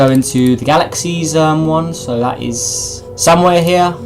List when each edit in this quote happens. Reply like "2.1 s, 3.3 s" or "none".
2.2 s